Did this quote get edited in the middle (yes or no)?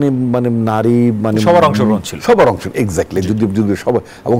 no